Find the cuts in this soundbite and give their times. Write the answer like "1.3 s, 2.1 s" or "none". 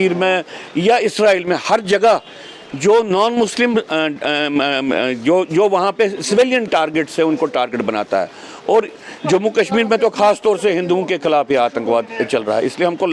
none